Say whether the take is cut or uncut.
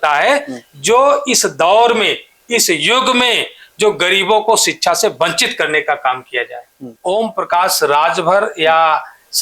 cut